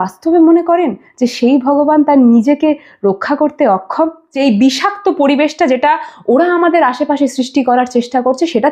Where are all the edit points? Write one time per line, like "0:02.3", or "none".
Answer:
0:04.2